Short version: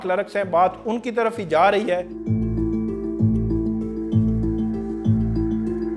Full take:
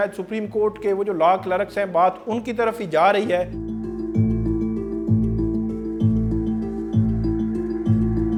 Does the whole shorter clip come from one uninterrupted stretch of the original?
no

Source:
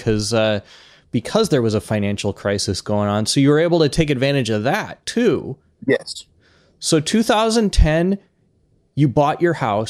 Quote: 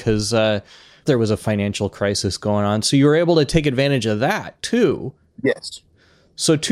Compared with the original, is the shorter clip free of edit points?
no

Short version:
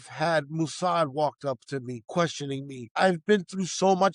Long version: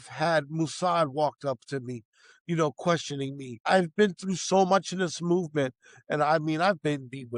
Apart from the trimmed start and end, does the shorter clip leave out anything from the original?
yes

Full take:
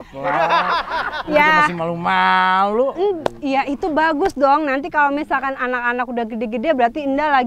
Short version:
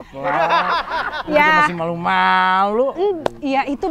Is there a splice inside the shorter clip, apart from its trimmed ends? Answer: no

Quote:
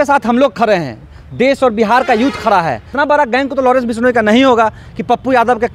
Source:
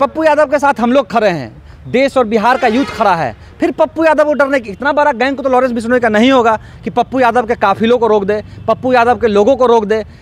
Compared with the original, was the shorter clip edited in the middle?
yes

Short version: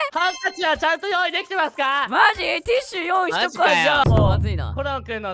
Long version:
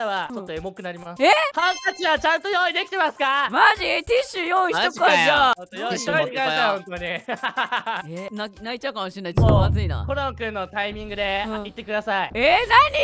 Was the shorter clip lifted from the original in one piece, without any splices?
no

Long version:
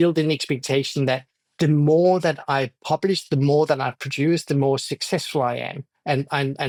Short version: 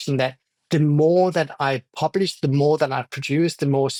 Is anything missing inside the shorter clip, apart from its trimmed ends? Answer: no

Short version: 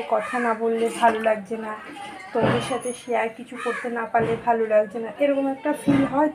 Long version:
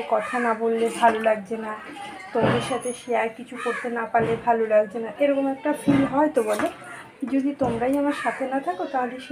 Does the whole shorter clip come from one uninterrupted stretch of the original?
yes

